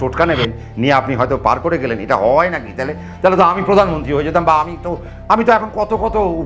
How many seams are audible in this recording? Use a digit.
0